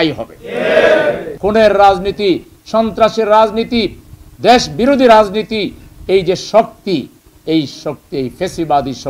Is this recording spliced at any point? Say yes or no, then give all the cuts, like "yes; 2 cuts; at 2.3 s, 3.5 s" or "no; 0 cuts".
yes; 1 cut; at 1.3 s